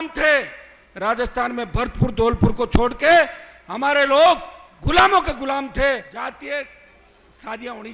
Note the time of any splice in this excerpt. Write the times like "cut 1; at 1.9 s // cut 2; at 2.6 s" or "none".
cut 1; at 6.1 s